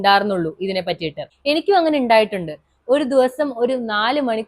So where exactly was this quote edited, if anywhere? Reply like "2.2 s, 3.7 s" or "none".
1.3 s